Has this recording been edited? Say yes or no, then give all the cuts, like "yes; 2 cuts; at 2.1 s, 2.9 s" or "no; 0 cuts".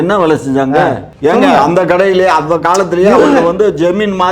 yes; 1 cut; at 1.1 s